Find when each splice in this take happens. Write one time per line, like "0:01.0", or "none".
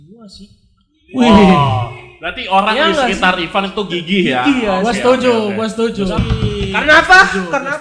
0:06.2